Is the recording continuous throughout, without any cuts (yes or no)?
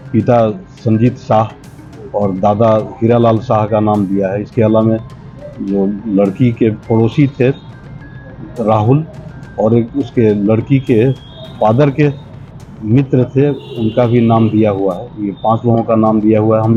yes